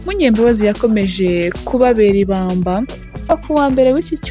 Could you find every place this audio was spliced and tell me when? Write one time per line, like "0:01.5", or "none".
0:03.1